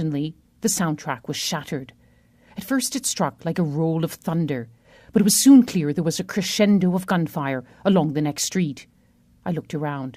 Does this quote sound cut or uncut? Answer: uncut